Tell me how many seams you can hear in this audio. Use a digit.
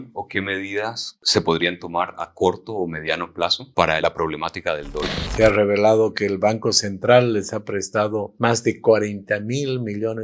3